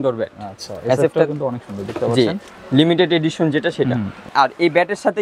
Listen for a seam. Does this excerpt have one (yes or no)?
yes